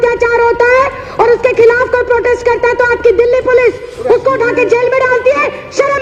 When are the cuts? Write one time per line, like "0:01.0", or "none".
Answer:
none

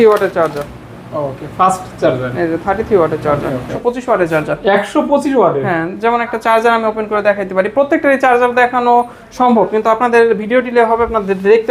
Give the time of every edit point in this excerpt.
0:03.7

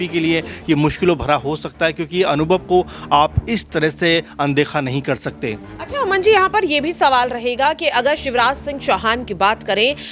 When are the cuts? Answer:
none

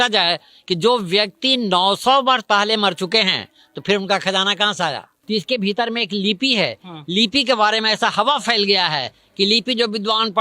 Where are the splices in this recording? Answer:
0:05.1

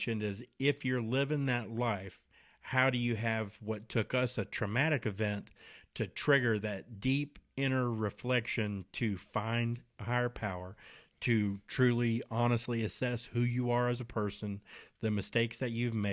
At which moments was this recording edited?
none

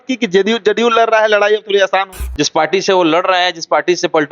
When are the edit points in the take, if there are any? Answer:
0:02.2

